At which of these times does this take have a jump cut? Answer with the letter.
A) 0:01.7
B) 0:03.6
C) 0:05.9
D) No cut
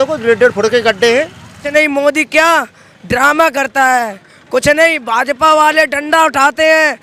A